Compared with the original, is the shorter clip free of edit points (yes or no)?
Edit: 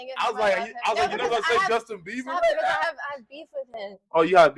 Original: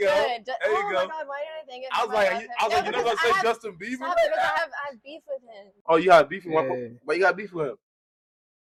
yes